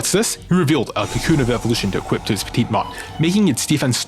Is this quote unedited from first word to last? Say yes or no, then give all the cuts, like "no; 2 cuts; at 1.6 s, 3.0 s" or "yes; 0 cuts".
yes; 0 cuts